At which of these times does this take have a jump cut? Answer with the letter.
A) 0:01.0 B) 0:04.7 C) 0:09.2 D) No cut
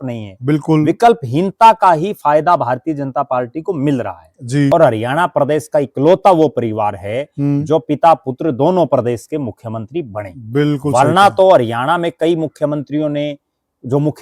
B